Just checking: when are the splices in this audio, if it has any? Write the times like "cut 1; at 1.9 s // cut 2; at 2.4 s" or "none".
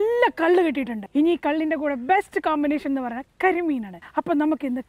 cut 1; at 1.0 s // cut 2; at 4.0 s